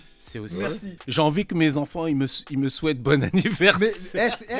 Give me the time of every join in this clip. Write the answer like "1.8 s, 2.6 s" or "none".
1.0 s

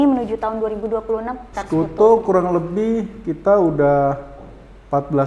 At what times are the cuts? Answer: 1.5 s

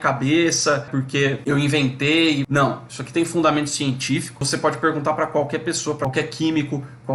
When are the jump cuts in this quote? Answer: 1.0 s, 2.5 s, 4.5 s, 6.0 s

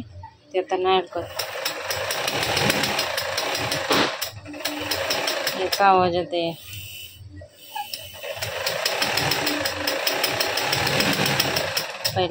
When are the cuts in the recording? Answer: none

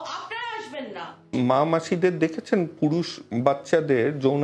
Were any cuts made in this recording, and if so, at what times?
1.3 s

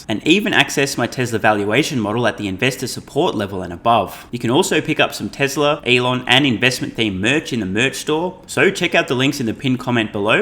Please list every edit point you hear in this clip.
4.3 s, 5.8 s, 8.4 s

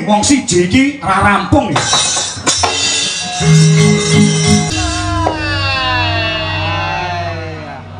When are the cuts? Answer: 4.7 s

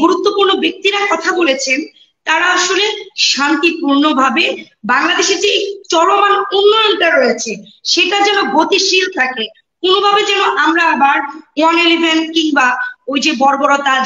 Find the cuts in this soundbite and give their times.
none

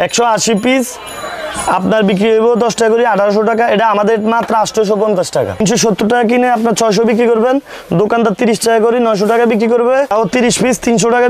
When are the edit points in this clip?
5.6 s, 10.1 s

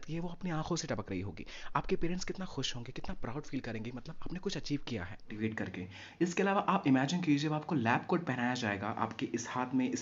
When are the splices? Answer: 5.3 s

